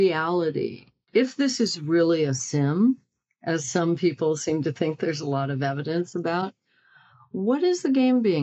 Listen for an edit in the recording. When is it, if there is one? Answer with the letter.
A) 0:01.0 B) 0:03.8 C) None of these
A